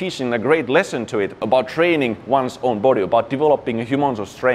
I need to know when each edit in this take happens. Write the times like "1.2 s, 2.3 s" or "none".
1.4 s